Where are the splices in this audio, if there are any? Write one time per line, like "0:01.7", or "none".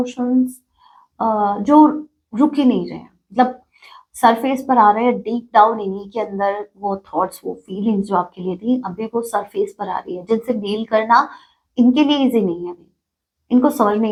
none